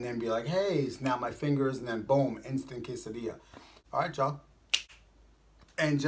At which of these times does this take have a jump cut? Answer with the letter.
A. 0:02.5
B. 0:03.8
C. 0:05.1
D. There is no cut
B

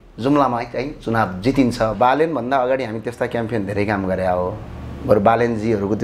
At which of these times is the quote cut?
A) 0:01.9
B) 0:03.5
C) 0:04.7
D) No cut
A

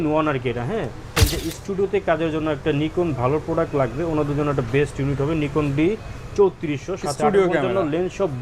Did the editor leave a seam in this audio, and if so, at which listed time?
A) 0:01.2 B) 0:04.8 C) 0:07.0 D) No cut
A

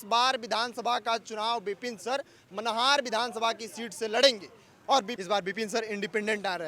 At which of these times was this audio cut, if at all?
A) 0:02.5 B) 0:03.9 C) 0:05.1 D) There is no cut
C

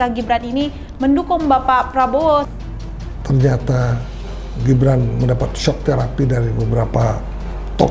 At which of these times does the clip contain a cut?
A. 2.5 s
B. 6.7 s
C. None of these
A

